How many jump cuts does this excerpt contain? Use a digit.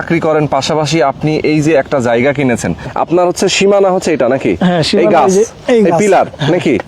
1